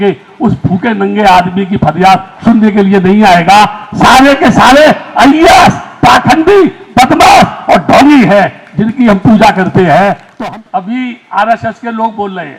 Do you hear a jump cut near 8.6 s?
no; 1 cut; at 10.3 s

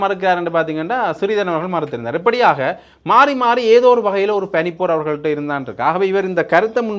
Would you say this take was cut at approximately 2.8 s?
no; 0 cuts

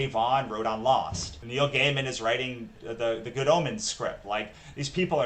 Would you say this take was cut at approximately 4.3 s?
no; 2 cuts; at 1.4 s, 2.8 s

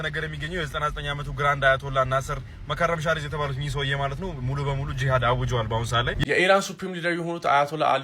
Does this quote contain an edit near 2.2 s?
no; 1 cut; at 6.2 s

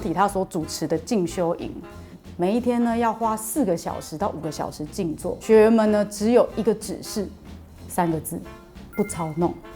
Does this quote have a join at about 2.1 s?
no; 1 cut; at 5.4 s

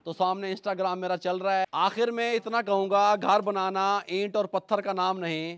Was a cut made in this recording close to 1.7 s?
yes; 1 cut; at 1.7 s

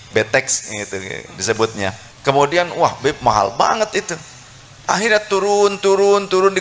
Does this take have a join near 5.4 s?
no; 1 cut; at 2.1 s

